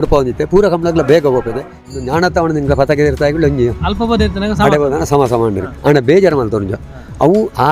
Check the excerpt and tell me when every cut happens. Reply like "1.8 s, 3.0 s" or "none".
1.9 s